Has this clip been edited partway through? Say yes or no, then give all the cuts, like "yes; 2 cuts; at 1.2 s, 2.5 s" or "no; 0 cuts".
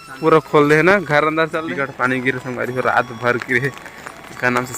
yes; 1 cut; at 1.5 s